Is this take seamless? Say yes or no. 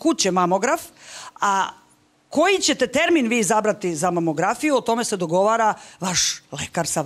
yes